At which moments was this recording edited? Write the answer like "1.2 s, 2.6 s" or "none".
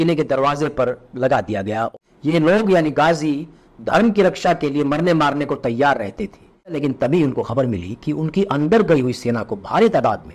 1.9 s, 6.8 s